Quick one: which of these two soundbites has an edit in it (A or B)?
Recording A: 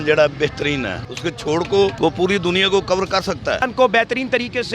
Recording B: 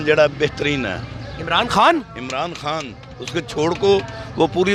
A